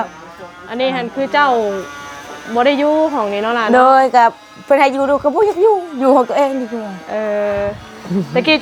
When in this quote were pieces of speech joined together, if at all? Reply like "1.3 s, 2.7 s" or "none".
none